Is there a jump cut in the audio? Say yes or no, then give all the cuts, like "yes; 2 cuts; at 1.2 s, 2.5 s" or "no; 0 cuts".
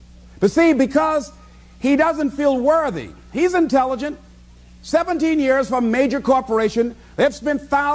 yes; 1 cut; at 2.8 s